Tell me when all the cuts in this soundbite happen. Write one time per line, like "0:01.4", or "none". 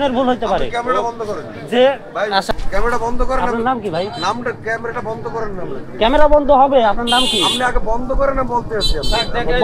0:02.5